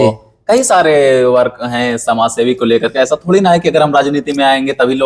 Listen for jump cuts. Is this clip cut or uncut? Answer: uncut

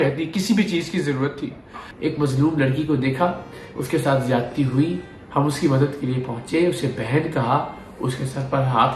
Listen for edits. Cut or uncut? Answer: cut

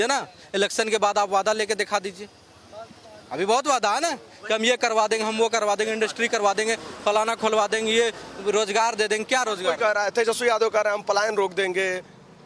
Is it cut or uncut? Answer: uncut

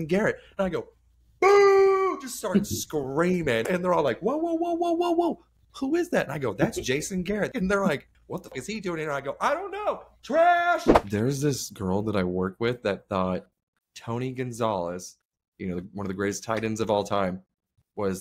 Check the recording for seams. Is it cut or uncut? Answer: cut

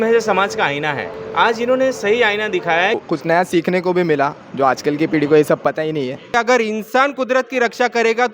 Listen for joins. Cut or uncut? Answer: cut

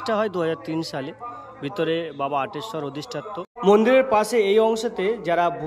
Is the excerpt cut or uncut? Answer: cut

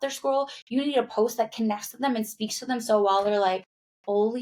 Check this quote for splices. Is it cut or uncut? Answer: uncut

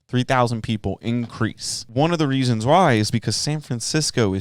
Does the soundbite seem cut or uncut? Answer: cut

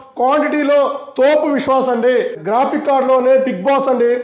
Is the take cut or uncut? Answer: cut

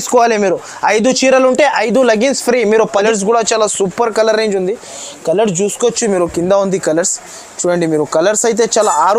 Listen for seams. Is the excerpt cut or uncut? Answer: cut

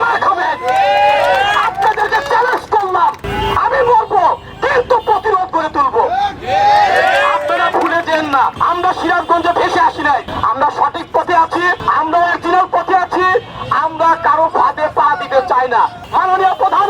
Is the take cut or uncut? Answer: cut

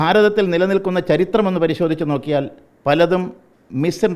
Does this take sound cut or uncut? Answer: uncut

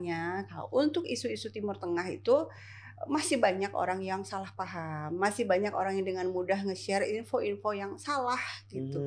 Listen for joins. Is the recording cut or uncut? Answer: uncut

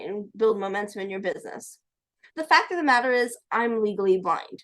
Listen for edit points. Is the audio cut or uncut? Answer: cut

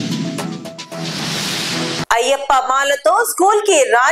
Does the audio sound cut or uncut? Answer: cut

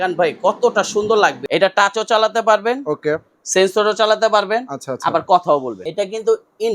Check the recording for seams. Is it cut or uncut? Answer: cut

